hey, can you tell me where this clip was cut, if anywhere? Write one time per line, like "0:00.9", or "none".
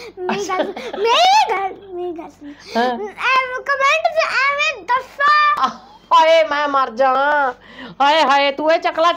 0:05.6